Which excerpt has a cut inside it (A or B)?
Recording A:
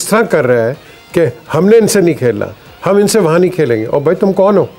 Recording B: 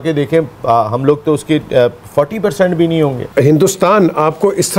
B